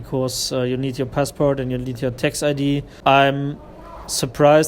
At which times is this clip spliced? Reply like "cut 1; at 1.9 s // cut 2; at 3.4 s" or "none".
cut 1; at 2.9 s